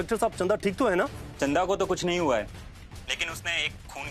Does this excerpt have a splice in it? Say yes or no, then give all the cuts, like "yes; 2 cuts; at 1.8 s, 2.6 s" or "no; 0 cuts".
yes; 1 cut; at 1.2 s